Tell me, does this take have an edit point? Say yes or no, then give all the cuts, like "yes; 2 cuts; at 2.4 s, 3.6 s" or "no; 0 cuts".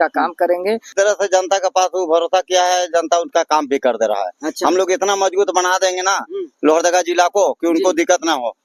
yes; 1 cut; at 0.9 s